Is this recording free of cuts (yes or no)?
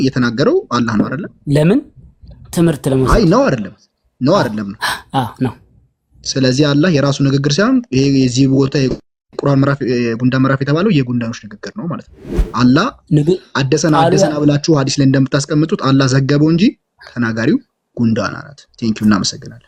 yes